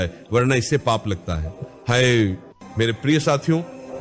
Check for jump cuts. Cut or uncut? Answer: uncut